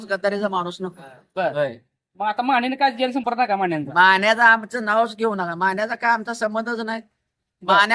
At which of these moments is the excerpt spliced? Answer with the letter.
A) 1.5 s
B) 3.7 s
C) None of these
A